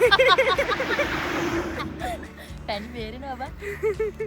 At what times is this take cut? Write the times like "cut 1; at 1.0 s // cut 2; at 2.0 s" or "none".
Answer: cut 1; at 2.2 s